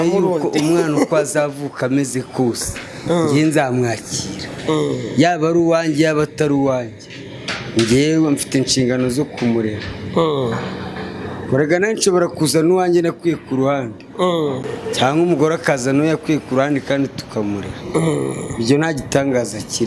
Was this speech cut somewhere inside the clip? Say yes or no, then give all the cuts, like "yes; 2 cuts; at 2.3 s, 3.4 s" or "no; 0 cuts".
no; 0 cuts